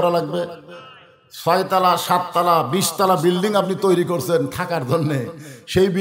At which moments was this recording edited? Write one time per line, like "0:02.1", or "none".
none